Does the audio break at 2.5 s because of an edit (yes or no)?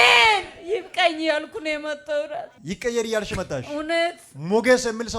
yes